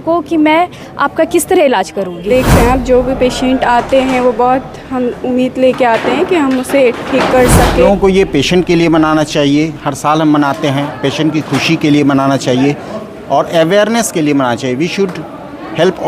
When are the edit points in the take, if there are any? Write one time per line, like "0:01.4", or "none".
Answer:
0:02.3
0:08.0